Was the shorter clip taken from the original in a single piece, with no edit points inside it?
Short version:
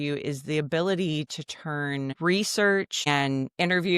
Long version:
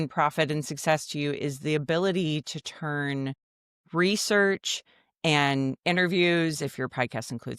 no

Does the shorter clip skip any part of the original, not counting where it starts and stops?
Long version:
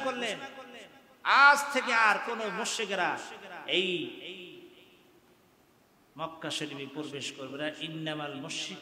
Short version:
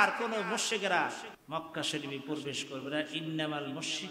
yes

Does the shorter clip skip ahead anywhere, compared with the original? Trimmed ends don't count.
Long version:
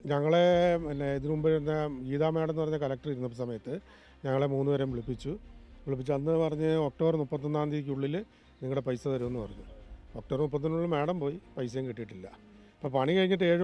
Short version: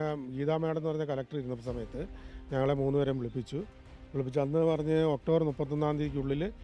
no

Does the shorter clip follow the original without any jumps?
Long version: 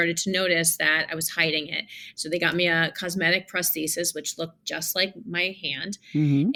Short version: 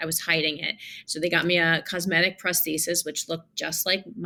yes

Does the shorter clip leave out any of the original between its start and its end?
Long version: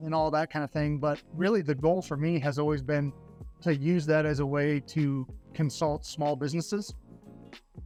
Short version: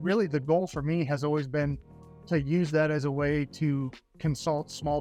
no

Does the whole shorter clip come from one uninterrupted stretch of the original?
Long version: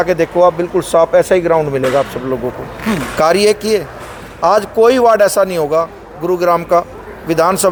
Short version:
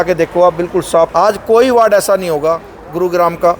no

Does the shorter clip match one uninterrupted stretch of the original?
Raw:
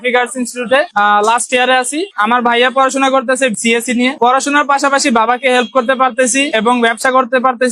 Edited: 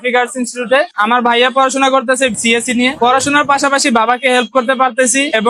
no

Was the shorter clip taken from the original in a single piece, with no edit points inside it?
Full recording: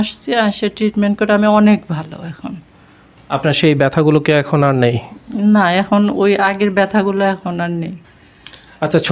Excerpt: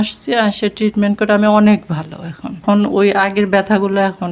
no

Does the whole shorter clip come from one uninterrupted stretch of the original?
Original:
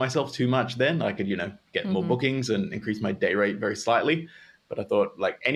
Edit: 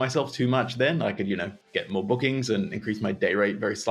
yes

